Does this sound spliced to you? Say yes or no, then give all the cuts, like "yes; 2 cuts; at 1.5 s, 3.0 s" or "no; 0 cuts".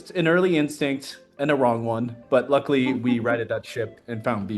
no; 0 cuts